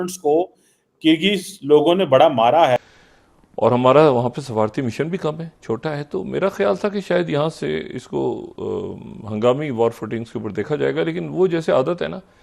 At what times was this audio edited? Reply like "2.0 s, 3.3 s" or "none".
2.8 s

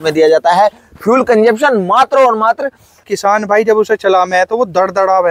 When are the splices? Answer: 2.8 s

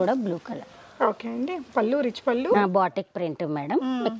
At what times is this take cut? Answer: 2.5 s

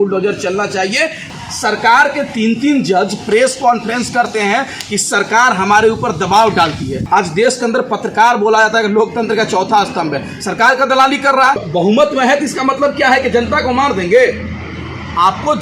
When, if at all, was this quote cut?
1.3 s, 7.0 s, 11.6 s

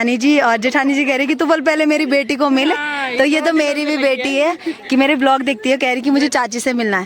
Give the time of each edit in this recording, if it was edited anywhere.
none

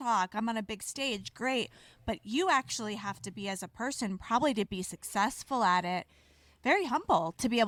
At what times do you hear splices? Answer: none

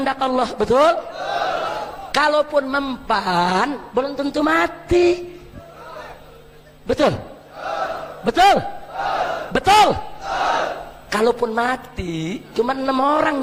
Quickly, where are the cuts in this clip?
none

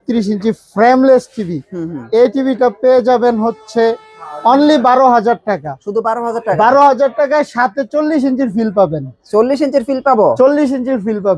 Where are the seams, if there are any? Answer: none

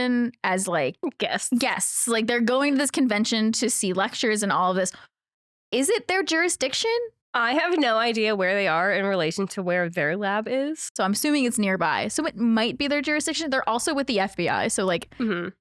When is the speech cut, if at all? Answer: 1.0 s, 7.2 s, 10.9 s

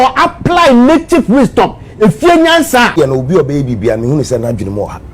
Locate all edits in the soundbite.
2.9 s

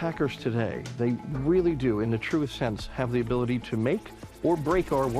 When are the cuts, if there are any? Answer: none

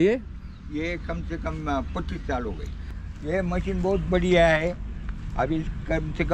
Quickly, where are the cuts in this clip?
2.9 s

